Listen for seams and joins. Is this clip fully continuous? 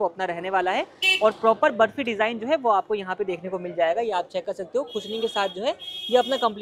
yes; 0 cuts

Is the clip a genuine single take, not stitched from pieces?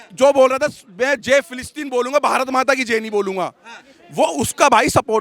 yes; 0 cuts

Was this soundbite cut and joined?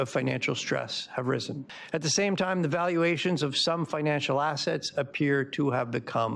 no; 0 cuts

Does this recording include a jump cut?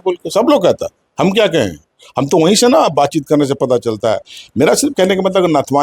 no; 0 cuts

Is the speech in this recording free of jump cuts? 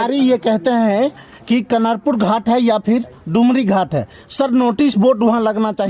yes; 0 cuts

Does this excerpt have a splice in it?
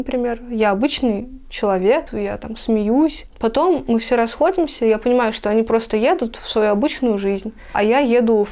yes; 3 cuts; at 2.1 s, 3.3 s, 7.7 s

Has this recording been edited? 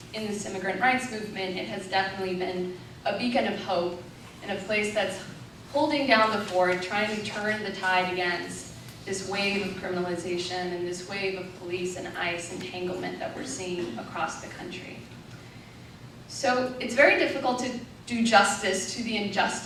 no; 0 cuts

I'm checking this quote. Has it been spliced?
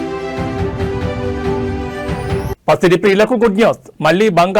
yes; 1 cut; at 2.4 s

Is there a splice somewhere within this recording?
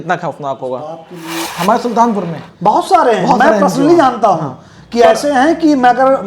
yes; 1 cut; at 1.5 s

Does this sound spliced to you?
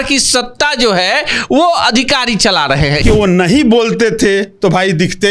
yes; 1 cut; at 3.0 s

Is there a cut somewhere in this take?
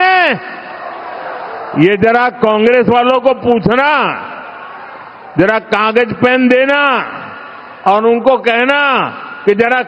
no; 0 cuts

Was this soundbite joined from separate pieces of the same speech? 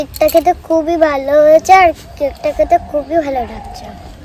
no; 0 cuts

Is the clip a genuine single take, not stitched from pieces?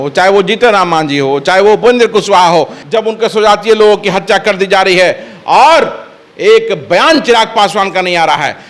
no; 1 cut; at 2.8 s

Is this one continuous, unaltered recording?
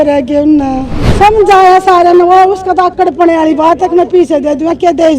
no; 1 cut; at 1.0 s

